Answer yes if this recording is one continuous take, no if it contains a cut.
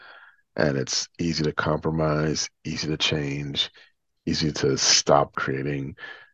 no